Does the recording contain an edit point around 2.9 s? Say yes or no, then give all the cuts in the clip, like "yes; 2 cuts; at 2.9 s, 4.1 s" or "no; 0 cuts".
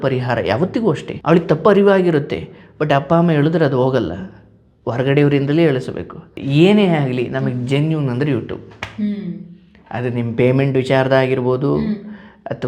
no; 2 cuts; at 1.1 s, 6.4 s